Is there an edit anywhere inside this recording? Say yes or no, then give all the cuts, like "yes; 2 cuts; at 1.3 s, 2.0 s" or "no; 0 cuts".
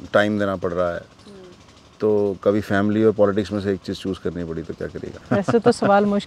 yes; 1 cut; at 5.2 s